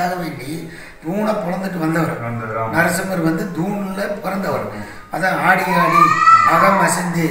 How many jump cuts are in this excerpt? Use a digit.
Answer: 0